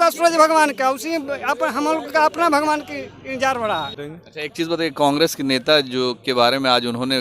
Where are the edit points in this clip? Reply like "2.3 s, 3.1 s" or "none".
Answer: 4.0 s